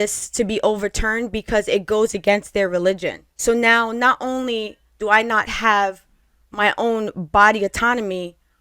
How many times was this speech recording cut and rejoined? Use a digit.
0